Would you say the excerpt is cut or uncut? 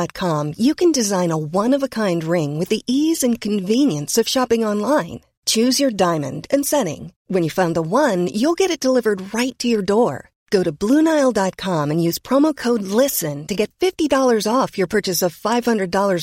uncut